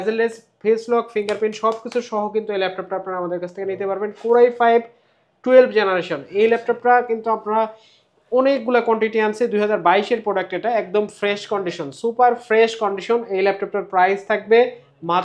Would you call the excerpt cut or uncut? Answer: uncut